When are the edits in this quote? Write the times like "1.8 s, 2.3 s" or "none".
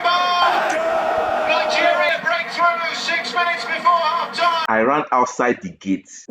none